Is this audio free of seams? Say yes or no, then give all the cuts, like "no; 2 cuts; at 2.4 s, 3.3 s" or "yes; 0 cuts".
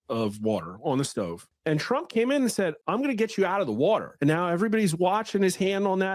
no; 3 cuts; at 1.5 s, 2.8 s, 4.1 s